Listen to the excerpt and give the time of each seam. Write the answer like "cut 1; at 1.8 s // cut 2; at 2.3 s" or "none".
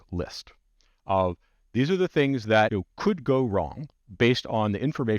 cut 1; at 2.8 s